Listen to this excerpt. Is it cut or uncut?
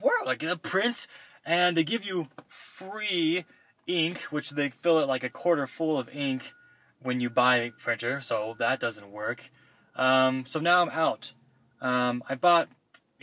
uncut